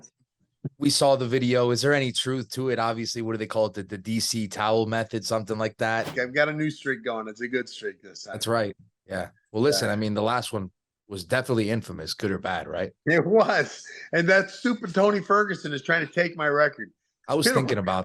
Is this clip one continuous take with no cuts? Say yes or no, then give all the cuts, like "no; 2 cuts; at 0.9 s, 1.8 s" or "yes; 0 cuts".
no; 1 cut; at 6.1 s